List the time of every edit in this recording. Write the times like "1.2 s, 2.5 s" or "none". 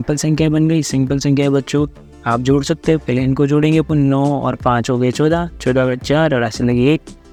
none